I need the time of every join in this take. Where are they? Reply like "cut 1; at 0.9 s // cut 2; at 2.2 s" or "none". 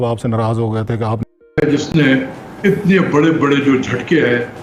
cut 1; at 1.3 s